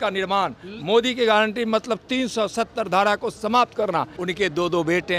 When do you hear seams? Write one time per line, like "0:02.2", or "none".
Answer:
0:04.1